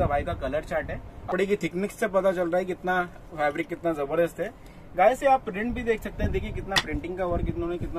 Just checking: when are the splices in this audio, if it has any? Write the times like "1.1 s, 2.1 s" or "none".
1.3 s